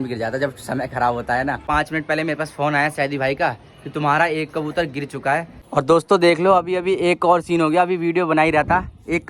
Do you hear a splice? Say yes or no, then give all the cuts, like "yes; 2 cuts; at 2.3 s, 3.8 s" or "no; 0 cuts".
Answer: yes; 2 cuts; at 1.6 s, 5.6 s